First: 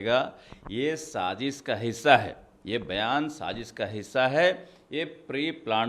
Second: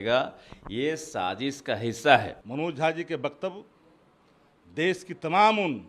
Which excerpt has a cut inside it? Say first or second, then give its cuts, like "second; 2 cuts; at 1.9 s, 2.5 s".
second; 1 cut; at 2.4 s